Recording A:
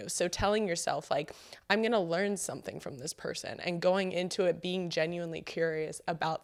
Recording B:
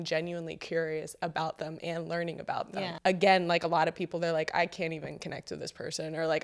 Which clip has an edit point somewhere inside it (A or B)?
B